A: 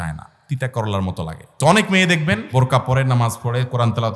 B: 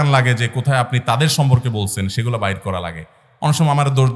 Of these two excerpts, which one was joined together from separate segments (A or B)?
A